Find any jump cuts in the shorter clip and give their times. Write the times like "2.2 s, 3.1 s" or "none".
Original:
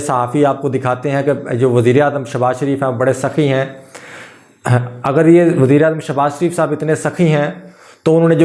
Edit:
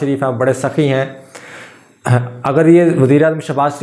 none